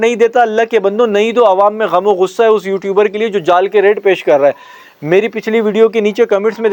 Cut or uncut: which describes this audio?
uncut